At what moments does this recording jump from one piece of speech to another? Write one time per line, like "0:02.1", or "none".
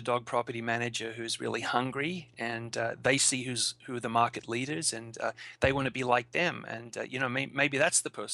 none